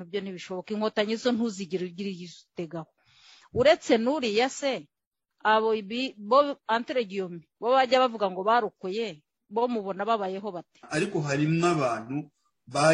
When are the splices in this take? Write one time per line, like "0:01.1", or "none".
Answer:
0:10.8